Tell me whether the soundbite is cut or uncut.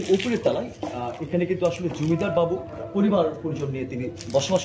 cut